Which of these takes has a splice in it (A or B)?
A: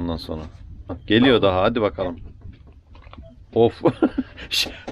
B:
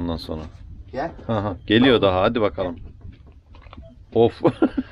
A